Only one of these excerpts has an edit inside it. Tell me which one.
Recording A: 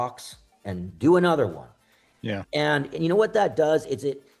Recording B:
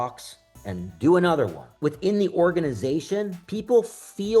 B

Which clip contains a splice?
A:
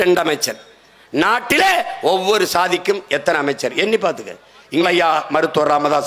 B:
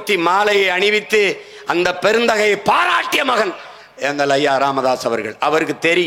A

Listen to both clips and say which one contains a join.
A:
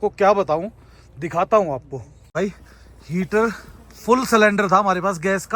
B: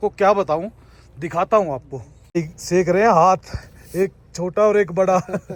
A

